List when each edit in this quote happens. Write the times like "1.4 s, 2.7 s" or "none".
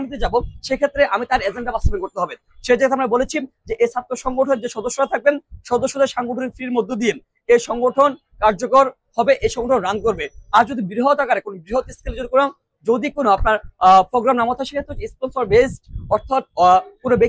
none